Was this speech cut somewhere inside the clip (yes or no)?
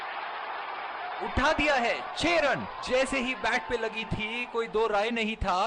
no